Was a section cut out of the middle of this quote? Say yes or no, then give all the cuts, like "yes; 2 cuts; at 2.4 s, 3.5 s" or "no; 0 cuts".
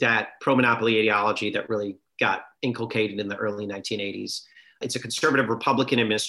yes; 2 cuts; at 2.5 s, 4.8 s